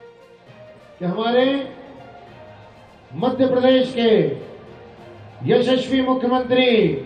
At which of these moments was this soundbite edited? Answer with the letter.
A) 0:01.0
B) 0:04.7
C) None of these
A